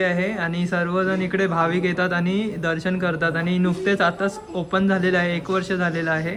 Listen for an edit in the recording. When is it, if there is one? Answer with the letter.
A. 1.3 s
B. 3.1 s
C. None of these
C